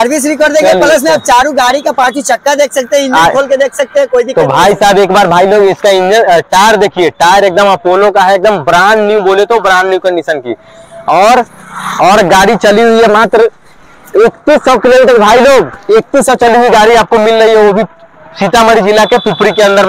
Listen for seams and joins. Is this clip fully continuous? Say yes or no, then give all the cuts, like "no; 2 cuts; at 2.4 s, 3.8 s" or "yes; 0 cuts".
yes; 0 cuts